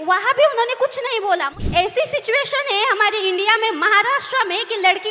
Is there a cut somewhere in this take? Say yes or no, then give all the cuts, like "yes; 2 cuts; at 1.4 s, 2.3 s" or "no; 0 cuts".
yes; 1 cut; at 1.5 s